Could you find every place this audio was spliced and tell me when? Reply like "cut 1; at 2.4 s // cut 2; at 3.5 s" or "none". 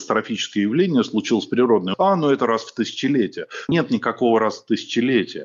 cut 1; at 1.9 s // cut 2; at 3.7 s